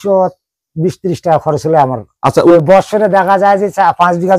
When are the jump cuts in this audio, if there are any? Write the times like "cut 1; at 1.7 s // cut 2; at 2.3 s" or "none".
cut 1; at 2.5 s